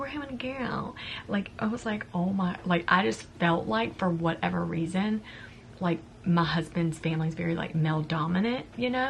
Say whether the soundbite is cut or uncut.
uncut